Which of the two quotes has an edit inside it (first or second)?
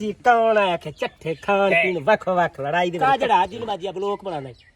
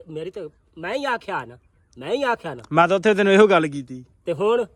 first